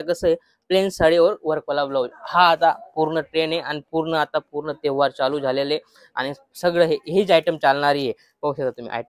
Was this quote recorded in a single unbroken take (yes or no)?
yes